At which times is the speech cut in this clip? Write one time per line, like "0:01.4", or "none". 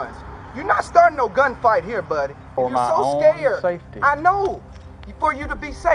0:02.4

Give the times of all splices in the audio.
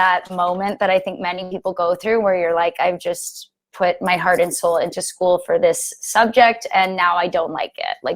none

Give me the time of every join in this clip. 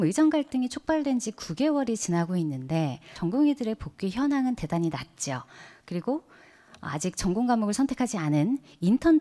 0:03.1

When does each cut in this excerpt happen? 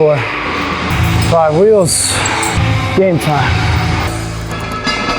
0:00.9
0:02.6
0:04.1

